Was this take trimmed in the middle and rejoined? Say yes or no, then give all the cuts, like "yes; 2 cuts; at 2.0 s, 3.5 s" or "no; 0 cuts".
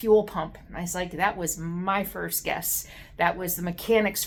no; 0 cuts